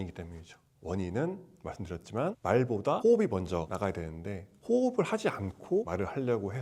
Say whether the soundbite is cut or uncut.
uncut